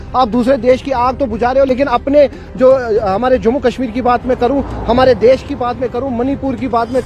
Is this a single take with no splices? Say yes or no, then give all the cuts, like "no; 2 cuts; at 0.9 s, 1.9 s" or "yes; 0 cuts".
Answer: yes; 0 cuts